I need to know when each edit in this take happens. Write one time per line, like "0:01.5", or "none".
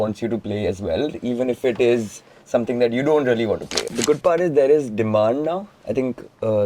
0:03.8